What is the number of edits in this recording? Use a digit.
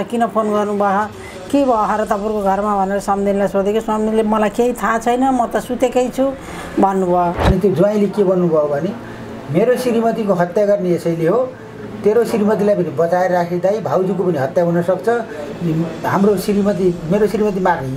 1